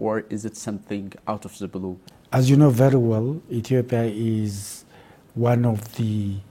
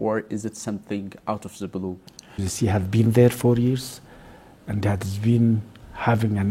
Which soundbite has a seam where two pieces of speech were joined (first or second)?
second